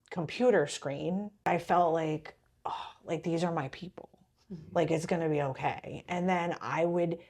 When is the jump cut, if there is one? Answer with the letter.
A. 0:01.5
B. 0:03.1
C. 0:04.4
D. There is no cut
A